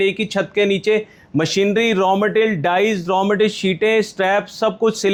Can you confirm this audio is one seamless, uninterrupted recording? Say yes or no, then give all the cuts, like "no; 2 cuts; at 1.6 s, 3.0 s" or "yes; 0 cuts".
yes; 0 cuts